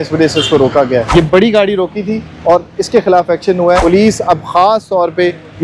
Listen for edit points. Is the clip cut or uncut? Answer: cut